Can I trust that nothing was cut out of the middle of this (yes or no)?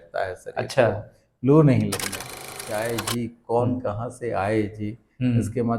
no